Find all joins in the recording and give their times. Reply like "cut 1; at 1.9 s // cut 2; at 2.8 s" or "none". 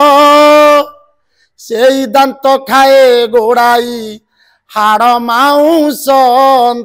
none